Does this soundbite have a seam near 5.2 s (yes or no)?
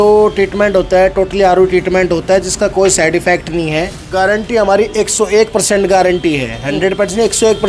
no